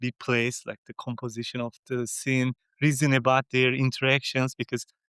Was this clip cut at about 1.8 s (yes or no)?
no